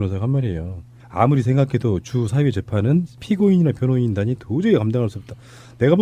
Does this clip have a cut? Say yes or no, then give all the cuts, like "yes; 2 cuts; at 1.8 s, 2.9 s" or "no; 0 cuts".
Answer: yes; 1 cut; at 4.0 s